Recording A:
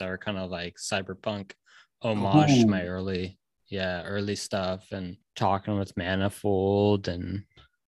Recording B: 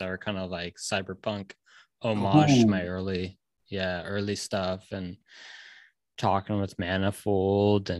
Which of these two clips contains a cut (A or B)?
A